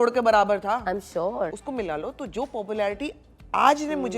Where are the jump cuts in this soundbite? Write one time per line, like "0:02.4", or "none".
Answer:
0:01.6